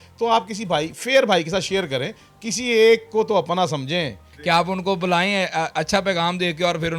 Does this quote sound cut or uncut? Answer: cut